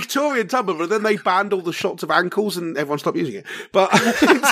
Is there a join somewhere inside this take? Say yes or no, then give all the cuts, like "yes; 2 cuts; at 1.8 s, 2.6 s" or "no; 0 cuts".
no; 0 cuts